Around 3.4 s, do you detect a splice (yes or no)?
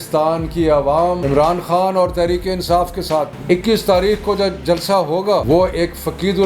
yes